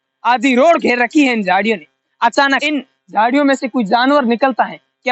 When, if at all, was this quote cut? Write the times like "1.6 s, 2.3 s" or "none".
2.6 s